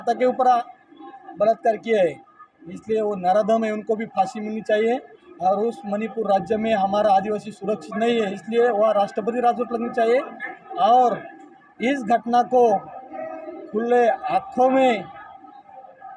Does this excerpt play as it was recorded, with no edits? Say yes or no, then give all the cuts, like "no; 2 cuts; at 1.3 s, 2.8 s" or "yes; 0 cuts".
yes; 0 cuts